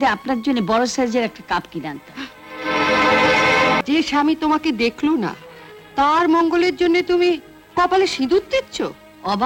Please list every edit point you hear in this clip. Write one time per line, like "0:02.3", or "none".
0:03.8